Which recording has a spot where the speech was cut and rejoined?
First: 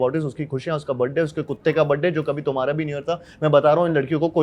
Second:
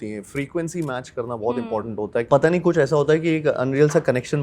second; 1 cut; at 2.3 s

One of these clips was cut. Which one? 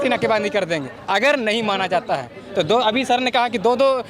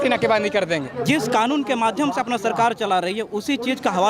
second; 1 cut; at 0.9 s

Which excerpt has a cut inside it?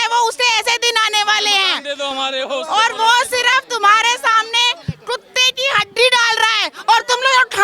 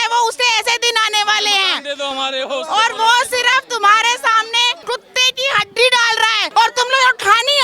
second; 2 cuts; at 4.8 s, 6.4 s

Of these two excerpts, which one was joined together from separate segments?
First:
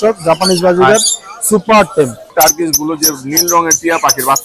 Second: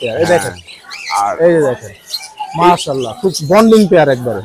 first; 1 cut; at 2.2 s

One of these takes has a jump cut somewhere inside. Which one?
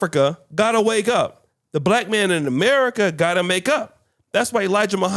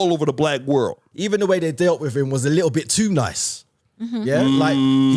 second; 1 cut; at 1.0 s

